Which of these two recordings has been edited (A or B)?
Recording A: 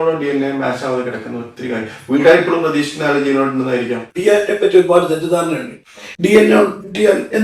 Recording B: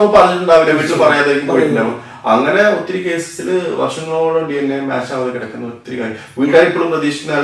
A